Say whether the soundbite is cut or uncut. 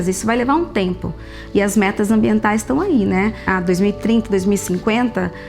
cut